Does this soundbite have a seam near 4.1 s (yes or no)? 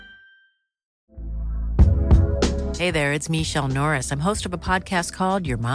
no